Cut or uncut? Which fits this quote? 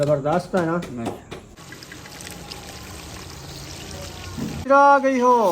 cut